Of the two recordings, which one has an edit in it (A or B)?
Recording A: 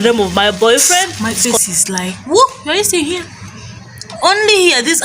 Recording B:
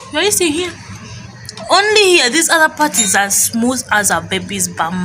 A